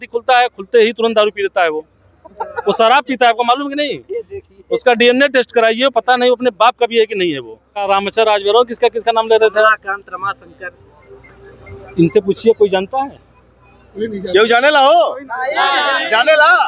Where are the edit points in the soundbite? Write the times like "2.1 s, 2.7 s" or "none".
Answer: 7.8 s